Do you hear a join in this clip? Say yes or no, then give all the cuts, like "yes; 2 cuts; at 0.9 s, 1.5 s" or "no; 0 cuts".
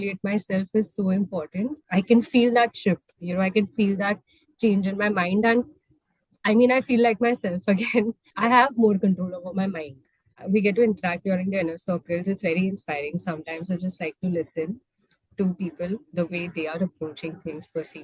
yes; 3 cuts; at 1.8 s, 8.3 s, 10.3 s